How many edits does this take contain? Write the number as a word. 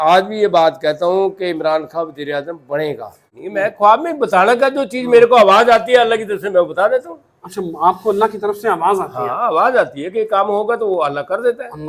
one